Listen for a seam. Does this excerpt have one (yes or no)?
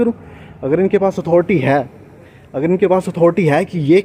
no